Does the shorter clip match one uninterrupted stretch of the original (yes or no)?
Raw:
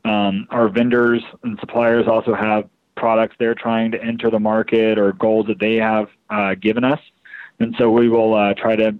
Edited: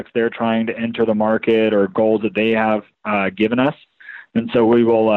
yes